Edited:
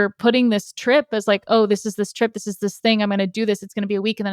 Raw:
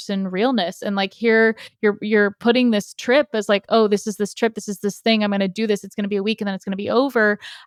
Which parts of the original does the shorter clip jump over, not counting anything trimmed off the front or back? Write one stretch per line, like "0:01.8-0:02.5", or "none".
none